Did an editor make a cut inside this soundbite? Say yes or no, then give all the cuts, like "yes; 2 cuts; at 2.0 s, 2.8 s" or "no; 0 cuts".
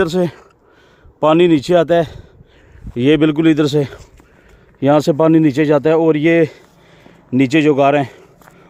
no; 0 cuts